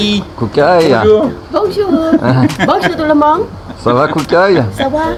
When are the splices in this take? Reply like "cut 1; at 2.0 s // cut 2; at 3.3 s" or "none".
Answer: none